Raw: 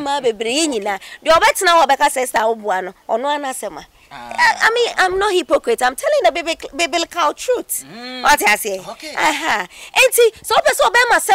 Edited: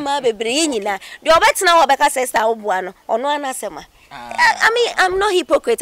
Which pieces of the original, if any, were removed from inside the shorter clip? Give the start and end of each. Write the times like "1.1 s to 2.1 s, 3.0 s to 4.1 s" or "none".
none